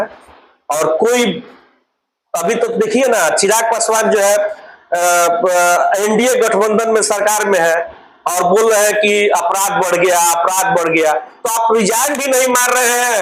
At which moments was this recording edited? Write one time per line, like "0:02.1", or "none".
none